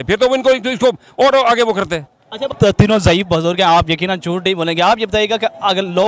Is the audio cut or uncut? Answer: cut